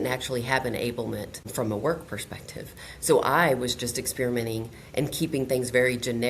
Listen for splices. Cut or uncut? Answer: cut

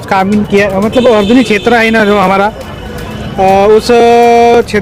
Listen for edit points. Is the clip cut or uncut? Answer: uncut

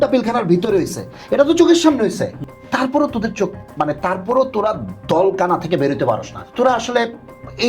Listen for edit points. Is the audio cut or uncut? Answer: cut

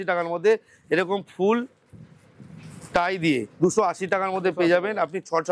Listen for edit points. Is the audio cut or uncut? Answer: uncut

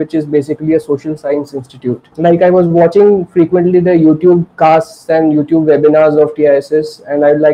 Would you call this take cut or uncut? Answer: cut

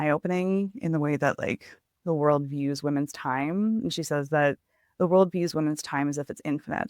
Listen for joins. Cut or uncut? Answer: uncut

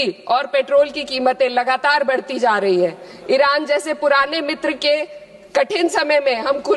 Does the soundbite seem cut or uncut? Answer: uncut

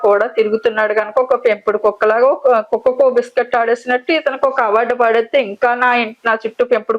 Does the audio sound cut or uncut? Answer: uncut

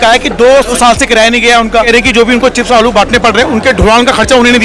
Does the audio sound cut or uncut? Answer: cut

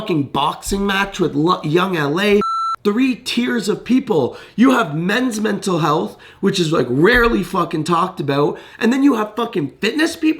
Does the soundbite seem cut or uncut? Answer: cut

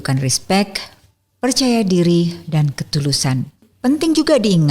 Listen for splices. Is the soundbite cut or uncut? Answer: cut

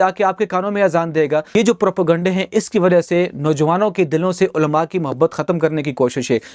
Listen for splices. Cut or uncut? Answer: cut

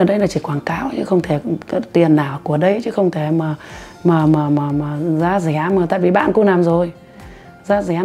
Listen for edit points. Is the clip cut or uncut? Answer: uncut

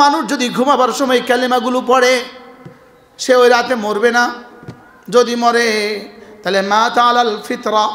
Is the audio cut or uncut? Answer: uncut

